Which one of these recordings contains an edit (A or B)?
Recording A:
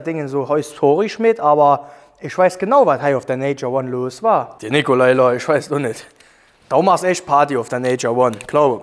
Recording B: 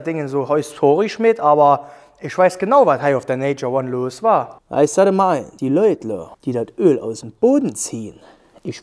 B